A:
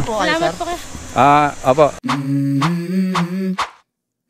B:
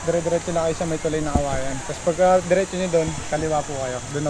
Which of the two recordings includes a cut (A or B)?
A